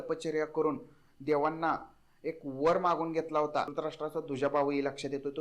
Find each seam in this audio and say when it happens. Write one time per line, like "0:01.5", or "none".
0:03.7